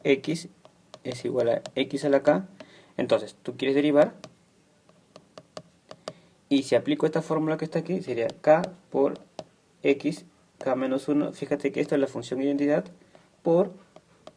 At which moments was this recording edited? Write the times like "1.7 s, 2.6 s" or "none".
7.5 s